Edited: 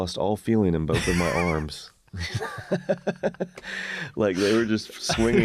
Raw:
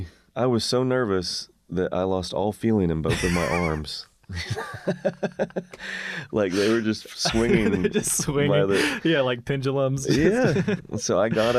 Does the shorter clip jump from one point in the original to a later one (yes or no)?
no